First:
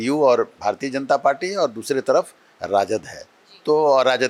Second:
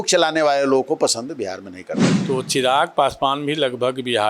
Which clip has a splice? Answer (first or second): second